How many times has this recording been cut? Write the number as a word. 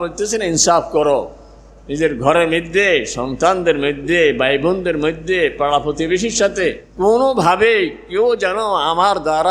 one